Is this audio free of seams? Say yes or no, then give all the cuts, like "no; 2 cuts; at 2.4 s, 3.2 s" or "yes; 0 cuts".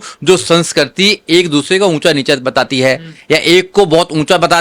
yes; 0 cuts